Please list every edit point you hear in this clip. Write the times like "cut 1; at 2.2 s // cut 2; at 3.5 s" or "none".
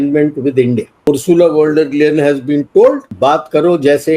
cut 1; at 1.1 s // cut 2; at 3.1 s